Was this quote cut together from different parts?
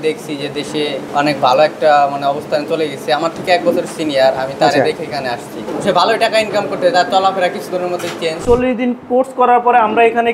yes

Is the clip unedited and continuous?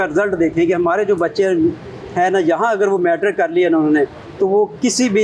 yes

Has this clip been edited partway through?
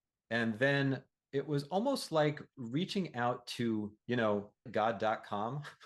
yes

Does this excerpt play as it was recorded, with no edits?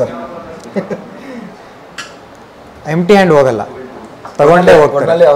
yes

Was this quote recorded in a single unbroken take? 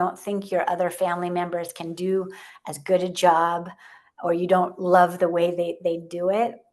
yes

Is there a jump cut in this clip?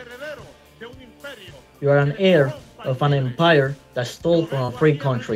no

